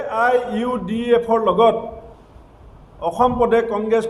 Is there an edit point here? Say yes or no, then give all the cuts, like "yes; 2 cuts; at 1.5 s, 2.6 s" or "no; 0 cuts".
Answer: no; 0 cuts